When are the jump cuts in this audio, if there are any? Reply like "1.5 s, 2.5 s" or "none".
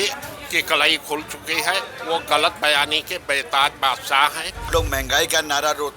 4.7 s